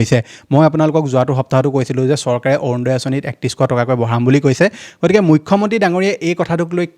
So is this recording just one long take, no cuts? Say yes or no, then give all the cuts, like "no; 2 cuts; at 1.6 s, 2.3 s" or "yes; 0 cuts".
yes; 0 cuts